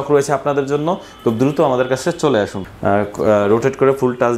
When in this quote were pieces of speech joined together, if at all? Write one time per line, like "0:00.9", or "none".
0:02.6